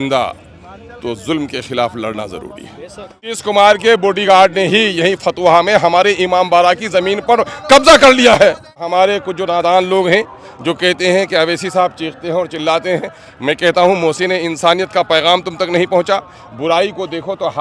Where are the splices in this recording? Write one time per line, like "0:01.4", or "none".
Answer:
0:03.2
0:08.9